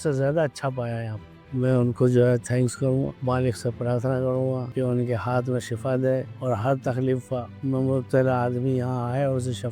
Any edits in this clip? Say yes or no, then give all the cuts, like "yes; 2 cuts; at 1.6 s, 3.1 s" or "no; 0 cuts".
yes; 1 cut; at 1.3 s